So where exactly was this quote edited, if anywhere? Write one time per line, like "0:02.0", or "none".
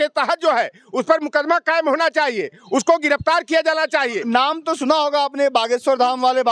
0:04.2